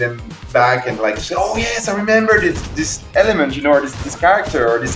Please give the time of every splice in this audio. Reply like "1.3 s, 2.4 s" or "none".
none